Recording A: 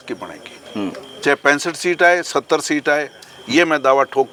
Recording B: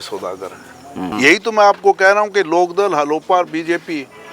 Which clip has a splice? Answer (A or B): B